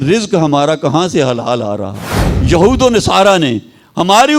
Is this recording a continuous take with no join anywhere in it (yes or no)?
no